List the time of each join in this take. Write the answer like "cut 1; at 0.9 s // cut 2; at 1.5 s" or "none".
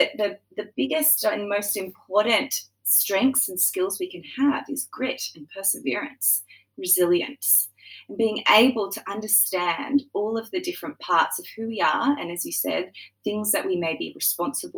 none